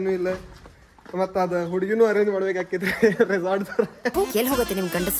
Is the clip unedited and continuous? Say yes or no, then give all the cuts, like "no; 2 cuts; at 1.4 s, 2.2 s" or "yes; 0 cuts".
no; 2 cuts; at 0.9 s, 4.1 s